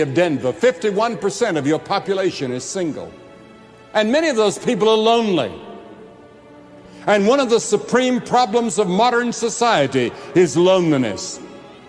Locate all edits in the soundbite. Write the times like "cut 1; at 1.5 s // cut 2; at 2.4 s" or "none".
none